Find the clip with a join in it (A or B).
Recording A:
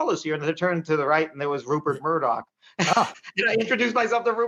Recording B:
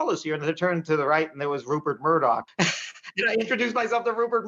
B